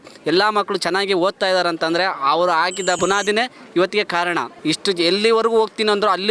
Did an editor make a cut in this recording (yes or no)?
yes